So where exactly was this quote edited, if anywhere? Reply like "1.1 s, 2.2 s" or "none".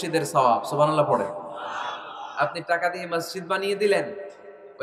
none